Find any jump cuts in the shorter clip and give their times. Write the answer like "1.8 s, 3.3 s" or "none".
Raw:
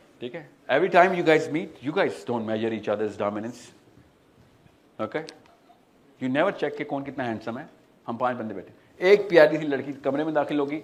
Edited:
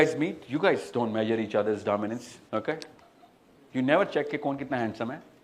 2.3 s